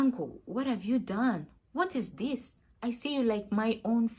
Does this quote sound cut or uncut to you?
uncut